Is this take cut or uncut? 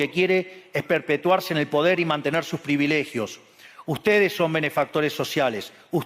uncut